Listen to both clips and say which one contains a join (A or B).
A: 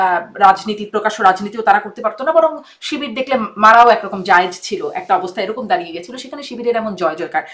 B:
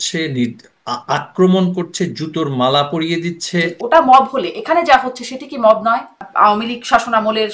B